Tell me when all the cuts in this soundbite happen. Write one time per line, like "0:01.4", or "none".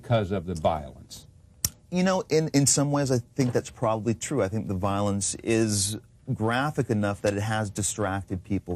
none